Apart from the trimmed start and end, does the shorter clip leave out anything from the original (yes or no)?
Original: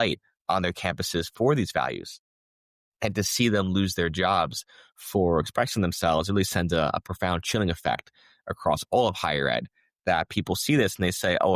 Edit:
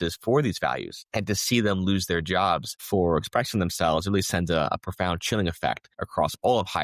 yes